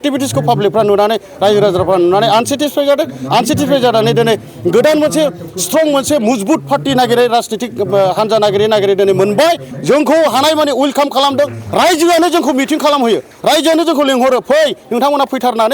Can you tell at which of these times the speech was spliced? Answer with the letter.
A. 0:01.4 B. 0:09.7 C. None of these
B